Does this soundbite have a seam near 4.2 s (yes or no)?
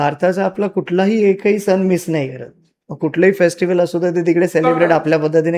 no